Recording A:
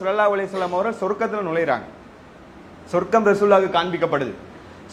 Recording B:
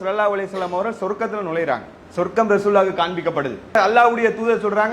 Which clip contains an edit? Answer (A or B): B